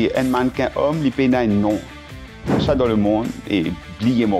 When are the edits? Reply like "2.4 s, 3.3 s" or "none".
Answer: none